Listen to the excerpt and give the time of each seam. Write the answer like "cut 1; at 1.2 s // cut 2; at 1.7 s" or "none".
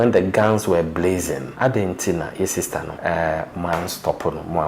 cut 1; at 1.5 s // cut 2; at 2.9 s